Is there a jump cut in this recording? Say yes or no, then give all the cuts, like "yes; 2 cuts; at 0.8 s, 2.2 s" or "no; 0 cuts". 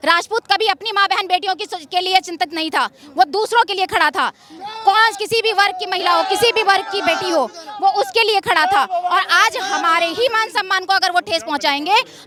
no; 0 cuts